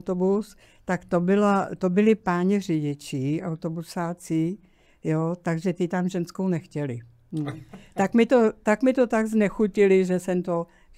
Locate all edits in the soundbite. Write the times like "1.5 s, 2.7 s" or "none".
none